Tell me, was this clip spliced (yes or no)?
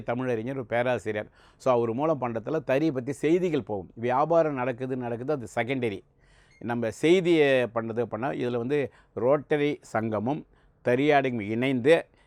no